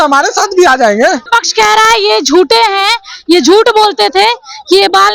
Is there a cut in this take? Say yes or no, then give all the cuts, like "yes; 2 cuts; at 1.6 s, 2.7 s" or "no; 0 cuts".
yes; 1 cut; at 1.2 s